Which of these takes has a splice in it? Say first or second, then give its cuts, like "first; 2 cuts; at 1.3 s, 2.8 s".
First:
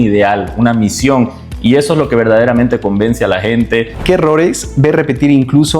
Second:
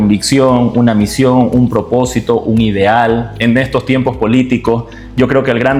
first; 1 cut; at 3.9 s